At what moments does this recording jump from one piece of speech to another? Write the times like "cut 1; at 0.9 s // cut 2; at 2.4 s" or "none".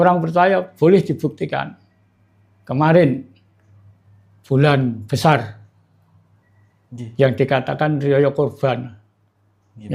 none

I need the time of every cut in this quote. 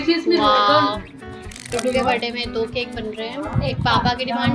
cut 1; at 1.7 s // cut 2; at 3.5 s

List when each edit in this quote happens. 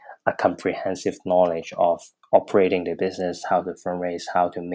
cut 1; at 2.1 s

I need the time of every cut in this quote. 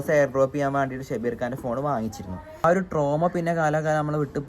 cut 1; at 2.6 s

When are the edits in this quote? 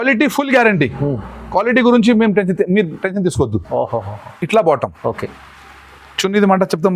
none

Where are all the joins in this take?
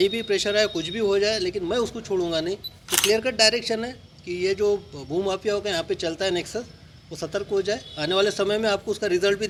none

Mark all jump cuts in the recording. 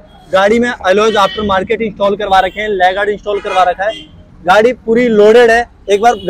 none

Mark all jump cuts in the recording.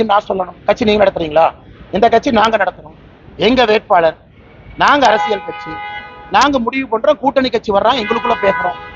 none

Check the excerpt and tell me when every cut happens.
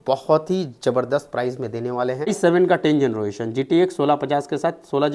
cut 1; at 2.3 s

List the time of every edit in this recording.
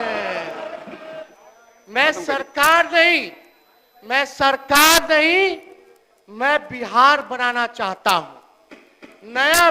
cut 1; at 1.3 s

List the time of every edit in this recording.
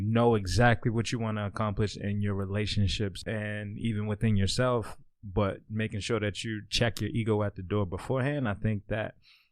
cut 1; at 3.2 s

